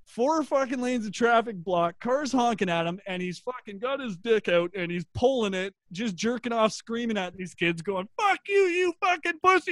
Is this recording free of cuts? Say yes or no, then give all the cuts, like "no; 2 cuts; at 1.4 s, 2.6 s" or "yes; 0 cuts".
yes; 0 cuts